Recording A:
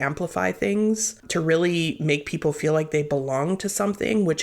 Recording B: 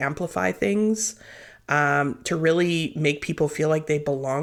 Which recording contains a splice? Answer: A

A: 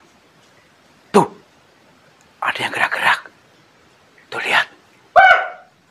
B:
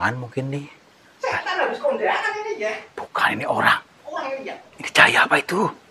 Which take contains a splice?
B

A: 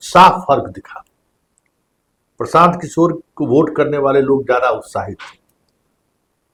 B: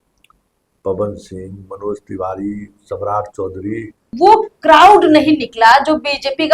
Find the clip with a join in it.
B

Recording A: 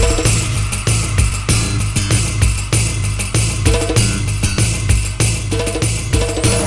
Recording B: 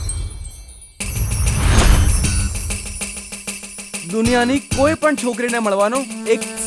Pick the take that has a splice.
B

